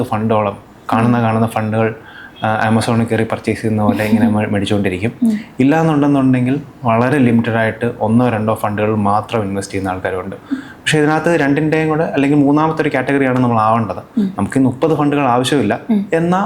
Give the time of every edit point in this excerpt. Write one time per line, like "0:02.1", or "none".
none